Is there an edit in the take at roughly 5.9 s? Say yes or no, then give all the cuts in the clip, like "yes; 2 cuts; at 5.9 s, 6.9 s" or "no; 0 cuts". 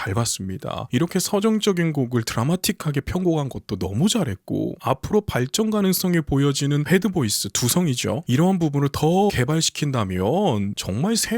no; 2 cuts; at 0.8 s, 9.3 s